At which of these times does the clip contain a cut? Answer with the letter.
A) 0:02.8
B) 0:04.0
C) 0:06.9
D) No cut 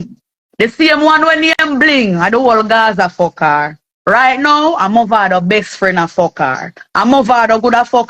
D